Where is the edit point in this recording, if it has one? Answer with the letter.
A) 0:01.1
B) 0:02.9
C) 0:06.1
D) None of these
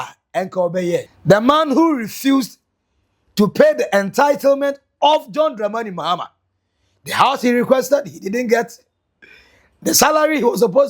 A